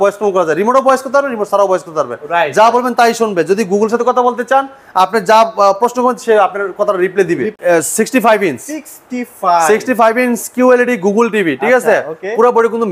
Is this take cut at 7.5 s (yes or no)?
yes